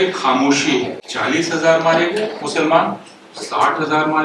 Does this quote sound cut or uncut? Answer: cut